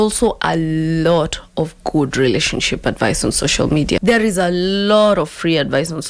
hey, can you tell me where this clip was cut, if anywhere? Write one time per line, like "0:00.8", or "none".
0:04.0